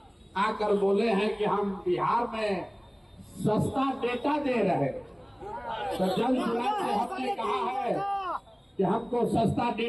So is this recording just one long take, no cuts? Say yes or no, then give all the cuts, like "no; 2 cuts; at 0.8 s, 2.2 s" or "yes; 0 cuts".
yes; 0 cuts